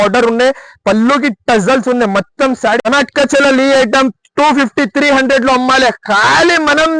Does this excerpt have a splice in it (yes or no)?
yes